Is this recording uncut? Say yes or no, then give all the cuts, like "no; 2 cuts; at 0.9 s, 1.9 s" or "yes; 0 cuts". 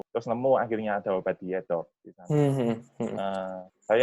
yes; 0 cuts